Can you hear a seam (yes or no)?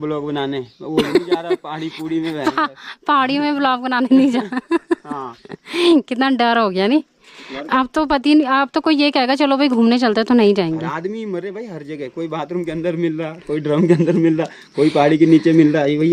no